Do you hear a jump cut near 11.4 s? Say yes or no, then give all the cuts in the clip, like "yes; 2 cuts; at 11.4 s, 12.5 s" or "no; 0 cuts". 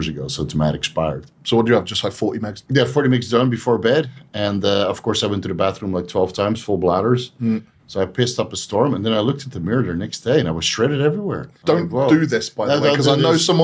yes; 3 cuts; at 1.3 s, 2.6 s, 11.4 s